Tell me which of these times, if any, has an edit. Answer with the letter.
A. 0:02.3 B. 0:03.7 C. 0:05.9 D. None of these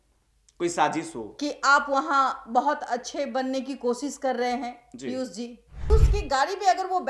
C